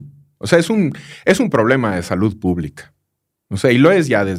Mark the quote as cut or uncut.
uncut